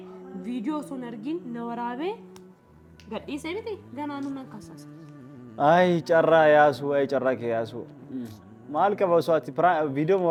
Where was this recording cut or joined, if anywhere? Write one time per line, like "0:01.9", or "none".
none

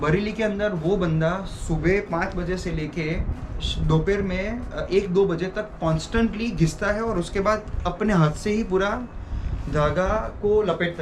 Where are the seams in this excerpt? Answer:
none

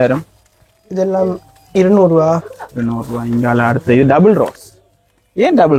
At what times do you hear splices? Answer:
none

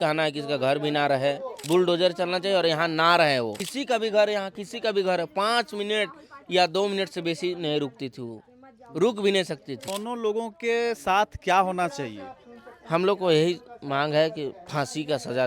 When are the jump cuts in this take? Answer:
0:01.6
0:03.7
0:09.9

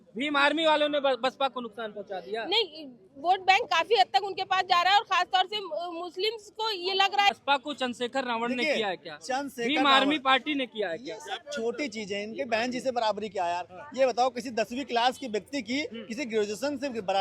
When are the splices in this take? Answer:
0:07.4

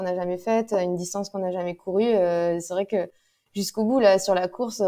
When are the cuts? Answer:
none

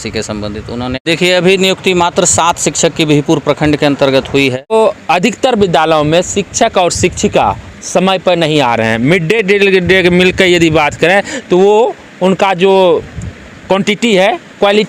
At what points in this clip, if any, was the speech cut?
0:01.1
0:04.7

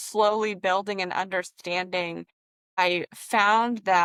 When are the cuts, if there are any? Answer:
none

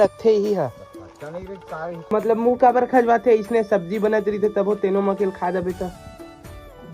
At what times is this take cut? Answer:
0:02.1

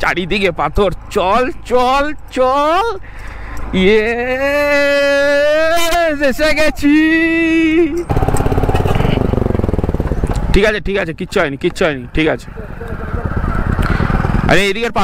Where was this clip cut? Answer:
0:08.1

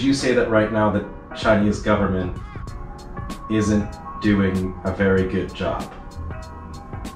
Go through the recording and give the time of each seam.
none

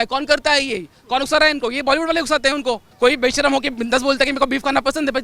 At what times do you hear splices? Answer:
0:02.9

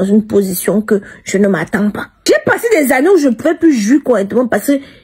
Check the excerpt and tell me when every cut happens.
0:02.1

